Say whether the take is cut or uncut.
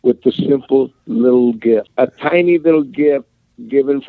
cut